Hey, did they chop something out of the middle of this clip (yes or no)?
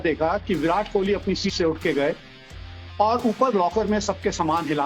yes